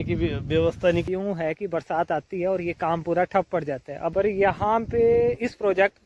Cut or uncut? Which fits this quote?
cut